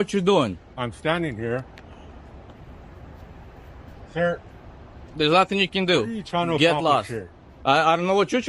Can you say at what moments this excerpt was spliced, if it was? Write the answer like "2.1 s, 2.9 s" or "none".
none